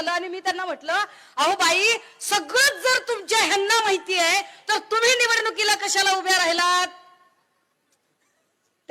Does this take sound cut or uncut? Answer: uncut